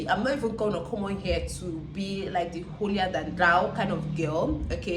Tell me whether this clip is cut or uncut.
uncut